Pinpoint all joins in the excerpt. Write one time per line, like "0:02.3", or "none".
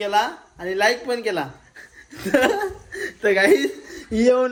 none